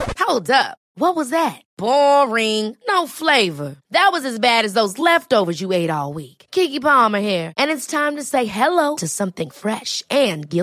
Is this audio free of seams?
yes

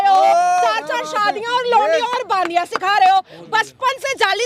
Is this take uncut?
yes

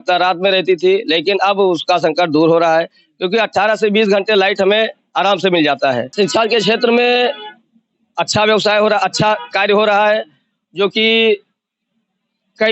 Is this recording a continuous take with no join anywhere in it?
no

